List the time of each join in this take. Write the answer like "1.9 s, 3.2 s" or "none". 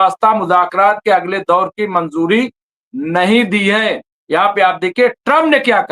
4.1 s